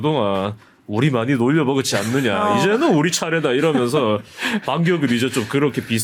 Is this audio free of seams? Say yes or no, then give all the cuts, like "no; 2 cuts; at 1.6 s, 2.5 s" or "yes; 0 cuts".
yes; 0 cuts